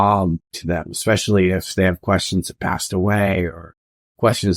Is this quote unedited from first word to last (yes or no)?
no